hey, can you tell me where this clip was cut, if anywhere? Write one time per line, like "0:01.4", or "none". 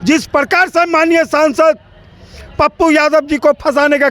none